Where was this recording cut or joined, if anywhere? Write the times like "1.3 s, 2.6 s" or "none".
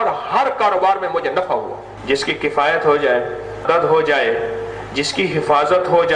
2.2 s, 3.6 s